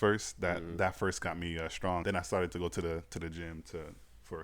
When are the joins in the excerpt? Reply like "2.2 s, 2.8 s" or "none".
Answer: 2.0 s